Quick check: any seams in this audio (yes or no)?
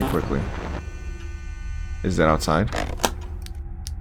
no